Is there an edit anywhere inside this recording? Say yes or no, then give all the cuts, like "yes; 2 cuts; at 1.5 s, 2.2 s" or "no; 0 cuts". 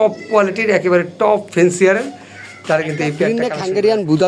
yes; 1 cut; at 3.3 s